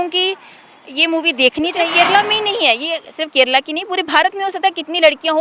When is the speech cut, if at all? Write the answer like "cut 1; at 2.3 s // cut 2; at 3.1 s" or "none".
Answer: cut 1; at 1.9 s